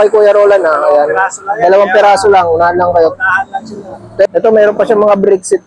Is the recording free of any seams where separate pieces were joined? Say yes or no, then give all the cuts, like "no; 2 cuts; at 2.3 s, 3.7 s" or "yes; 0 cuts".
no; 1 cut; at 4.3 s